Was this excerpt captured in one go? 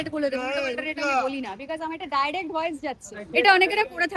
no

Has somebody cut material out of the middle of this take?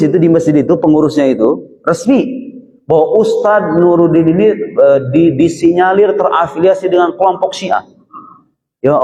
no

